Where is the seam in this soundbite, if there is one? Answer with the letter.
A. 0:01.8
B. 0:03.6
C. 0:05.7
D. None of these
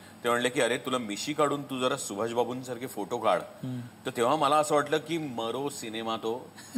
D